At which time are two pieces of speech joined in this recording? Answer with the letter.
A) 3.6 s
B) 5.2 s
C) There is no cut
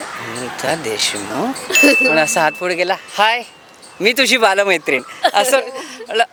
C